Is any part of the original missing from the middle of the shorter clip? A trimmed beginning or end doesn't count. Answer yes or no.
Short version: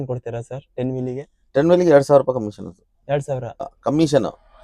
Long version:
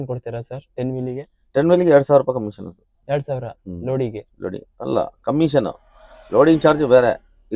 yes